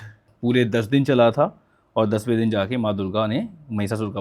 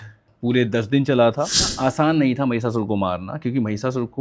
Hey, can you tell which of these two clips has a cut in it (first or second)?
second